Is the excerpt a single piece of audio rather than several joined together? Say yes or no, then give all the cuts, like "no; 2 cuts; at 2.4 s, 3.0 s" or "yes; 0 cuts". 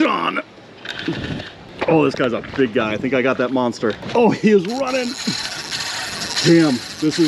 no; 2 cuts; at 1.6 s, 4.0 s